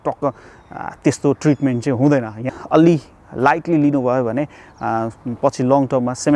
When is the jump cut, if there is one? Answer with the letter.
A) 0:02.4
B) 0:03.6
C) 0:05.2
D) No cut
A